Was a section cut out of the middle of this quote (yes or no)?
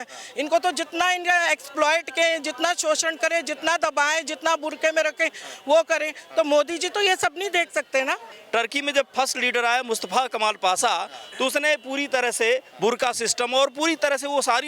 yes